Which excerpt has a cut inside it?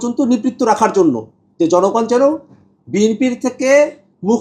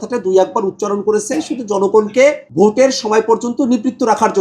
second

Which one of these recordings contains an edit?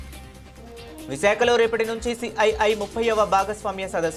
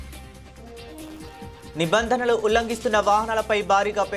first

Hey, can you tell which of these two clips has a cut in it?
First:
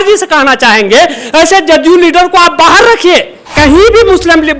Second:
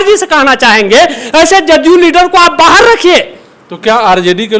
first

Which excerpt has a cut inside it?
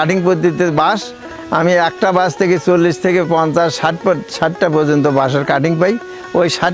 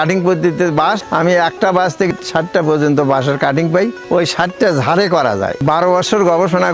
second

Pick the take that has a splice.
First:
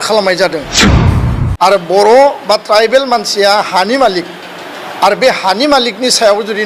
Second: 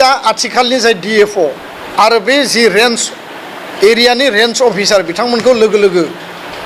first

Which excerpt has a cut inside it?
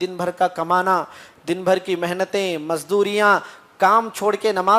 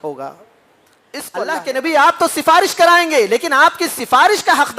second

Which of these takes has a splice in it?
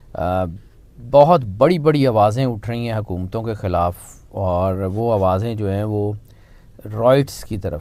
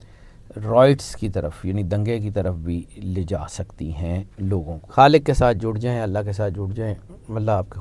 second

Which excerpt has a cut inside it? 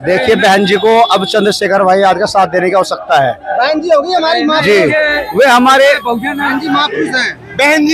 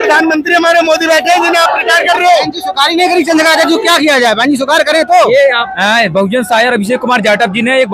second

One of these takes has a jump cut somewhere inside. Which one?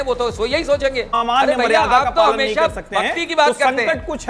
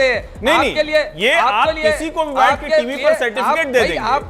first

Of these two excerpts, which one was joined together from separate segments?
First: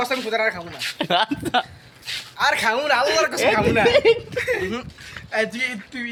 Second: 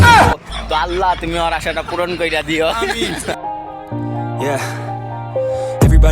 second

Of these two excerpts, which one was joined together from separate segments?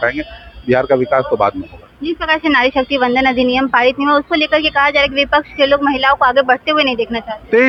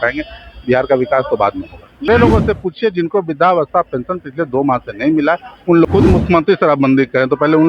second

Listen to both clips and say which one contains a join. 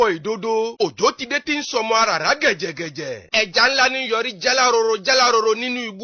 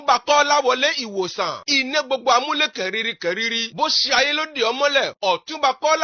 second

